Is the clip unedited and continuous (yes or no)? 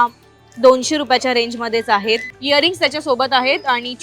no